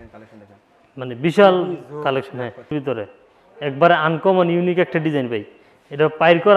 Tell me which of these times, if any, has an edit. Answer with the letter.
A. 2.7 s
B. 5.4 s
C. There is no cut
A